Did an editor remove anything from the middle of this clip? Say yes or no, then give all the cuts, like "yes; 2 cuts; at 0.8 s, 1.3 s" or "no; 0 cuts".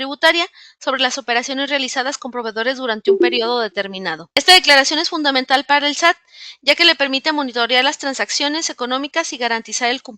yes; 1 cut; at 4.1 s